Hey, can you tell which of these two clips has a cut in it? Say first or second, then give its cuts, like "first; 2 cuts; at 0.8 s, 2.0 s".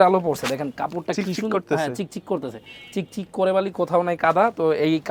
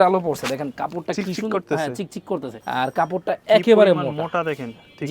second; 1 cut; at 2.6 s